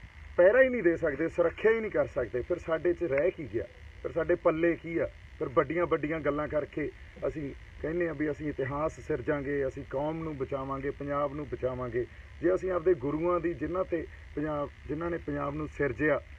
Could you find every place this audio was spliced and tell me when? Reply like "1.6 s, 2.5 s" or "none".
none